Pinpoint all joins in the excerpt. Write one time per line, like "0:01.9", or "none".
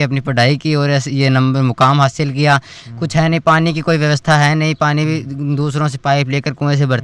none